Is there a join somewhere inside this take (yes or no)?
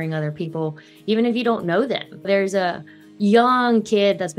yes